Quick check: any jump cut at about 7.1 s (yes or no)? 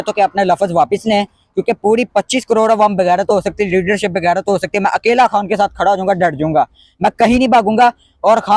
no